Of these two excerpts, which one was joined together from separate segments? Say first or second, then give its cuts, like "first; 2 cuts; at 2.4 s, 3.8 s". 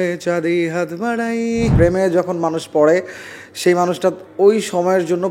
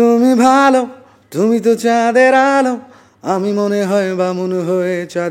first; 1 cut; at 1.7 s